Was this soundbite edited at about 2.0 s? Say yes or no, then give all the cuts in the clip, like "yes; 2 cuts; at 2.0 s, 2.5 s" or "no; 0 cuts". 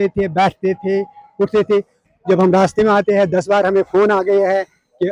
yes; 1 cut; at 2.0 s